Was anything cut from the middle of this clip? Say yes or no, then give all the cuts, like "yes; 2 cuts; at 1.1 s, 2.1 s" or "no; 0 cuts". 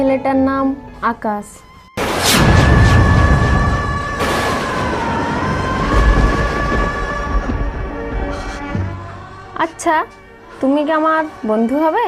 no; 0 cuts